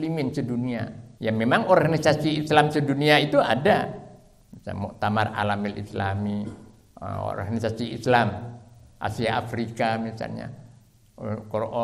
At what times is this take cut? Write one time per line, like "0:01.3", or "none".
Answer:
0:01.0